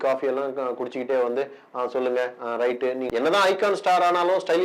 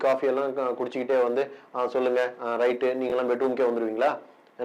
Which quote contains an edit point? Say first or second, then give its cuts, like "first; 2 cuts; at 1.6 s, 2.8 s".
first; 1 cut; at 3.0 s